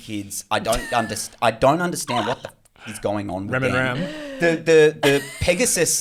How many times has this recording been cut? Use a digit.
0